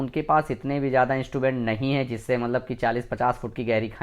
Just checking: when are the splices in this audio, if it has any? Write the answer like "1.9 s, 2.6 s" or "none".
none